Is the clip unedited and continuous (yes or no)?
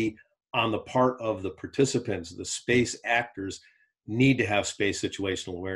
yes